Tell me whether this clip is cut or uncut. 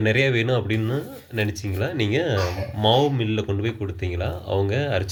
uncut